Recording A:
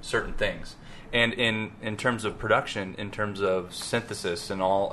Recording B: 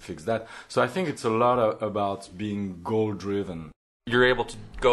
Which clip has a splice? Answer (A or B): B